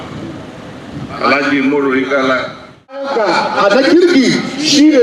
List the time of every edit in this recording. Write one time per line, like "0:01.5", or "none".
0:03.1